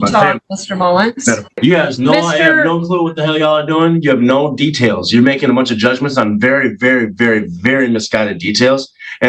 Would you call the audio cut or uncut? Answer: cut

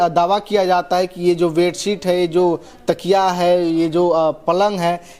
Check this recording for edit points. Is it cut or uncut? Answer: uncut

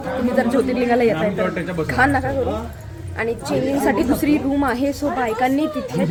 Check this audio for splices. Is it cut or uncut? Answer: uncut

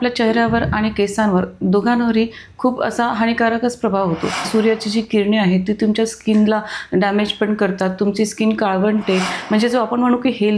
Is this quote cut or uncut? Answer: cut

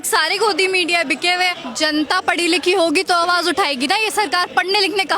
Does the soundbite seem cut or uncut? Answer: cut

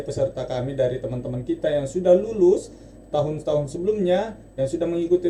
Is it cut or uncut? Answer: uncut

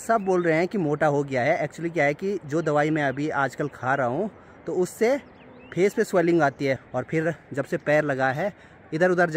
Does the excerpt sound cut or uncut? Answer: uncut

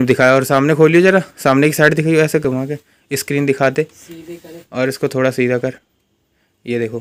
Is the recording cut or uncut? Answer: uncut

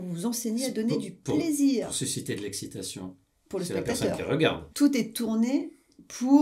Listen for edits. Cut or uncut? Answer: uncut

